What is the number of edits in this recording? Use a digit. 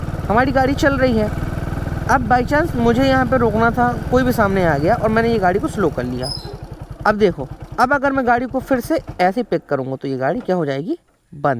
0